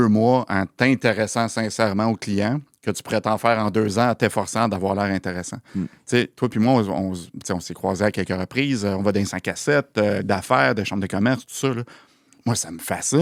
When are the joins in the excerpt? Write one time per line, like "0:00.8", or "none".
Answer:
none